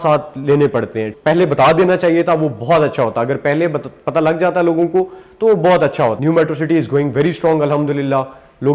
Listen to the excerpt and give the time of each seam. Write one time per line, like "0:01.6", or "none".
0:01.1
0:06.2

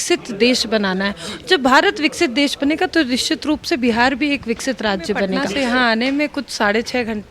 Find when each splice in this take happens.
0:05.4

